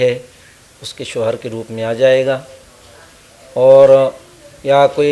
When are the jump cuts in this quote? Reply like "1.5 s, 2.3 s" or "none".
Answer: none